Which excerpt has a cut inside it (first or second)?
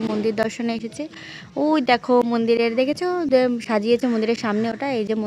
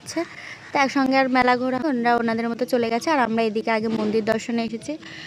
second